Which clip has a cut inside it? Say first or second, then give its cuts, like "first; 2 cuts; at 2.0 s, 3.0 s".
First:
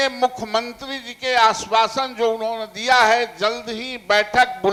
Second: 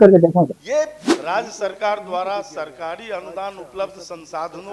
second; 1 cut; at 1.1 s